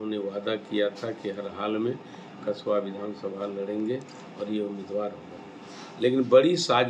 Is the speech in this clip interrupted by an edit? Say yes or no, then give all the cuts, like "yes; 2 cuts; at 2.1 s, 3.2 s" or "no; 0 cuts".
no; 0 cuts